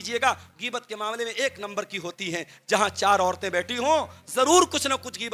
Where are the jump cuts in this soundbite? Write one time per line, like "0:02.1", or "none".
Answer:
none